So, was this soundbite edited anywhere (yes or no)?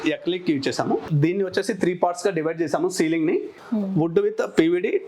yes